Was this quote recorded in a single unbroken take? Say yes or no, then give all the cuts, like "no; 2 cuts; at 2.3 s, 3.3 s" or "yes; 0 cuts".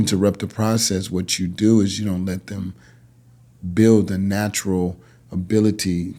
yes; 0 cuts